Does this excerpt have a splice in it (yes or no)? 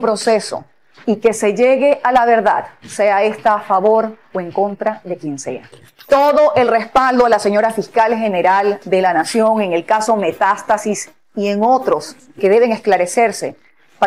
yes